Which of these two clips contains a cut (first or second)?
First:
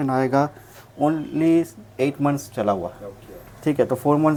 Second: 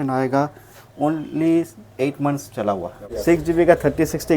second